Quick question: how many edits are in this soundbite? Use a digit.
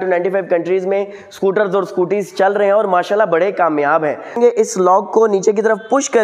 1